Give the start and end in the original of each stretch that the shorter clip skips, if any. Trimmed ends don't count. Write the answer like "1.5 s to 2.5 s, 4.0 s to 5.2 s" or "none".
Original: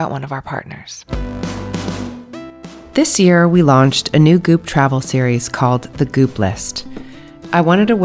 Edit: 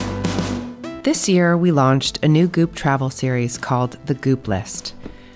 2.5 s to 2.9 s

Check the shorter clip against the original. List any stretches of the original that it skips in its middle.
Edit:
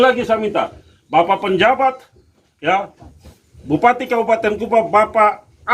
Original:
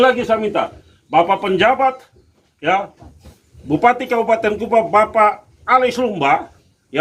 none

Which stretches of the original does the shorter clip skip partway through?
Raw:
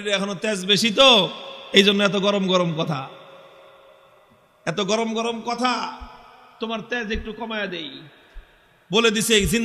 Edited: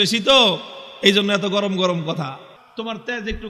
3.2 s to 6.4 s

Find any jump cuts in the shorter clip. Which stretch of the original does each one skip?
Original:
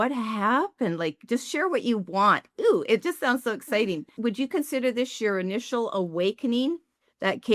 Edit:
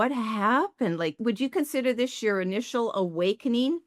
1.2 s to 4.1 s

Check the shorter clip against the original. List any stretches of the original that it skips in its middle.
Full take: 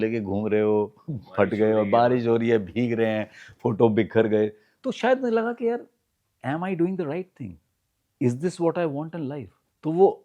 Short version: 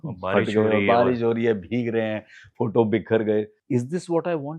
4.6 s to 8.1 s

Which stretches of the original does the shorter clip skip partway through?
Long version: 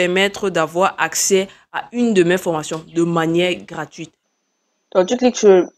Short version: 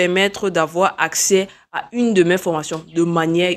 none

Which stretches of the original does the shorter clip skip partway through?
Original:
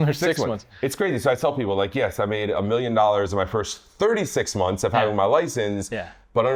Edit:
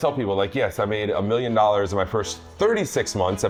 none

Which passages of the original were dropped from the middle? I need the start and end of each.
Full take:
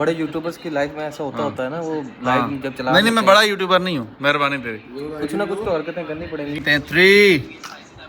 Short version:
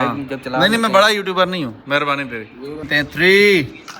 5.2 s to 6.6 s

